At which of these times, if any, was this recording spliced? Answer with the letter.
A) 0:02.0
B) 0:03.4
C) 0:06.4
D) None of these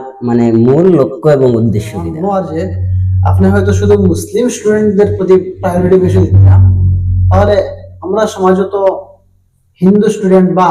A